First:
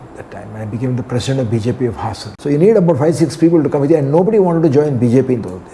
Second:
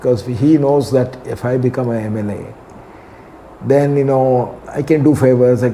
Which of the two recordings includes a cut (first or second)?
first